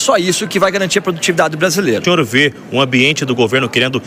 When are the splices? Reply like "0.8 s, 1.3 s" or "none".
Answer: 2.0 s